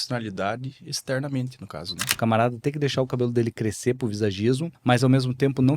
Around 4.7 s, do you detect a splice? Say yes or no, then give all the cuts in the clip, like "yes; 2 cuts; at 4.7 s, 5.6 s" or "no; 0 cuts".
yes; 2 cuts; at 2.1 s, 4.7 s